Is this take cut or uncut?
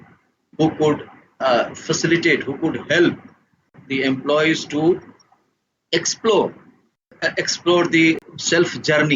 cut